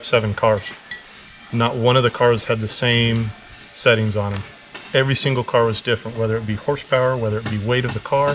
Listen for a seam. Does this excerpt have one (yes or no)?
no